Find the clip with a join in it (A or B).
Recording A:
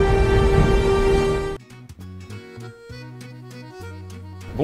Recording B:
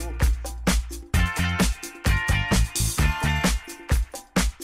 A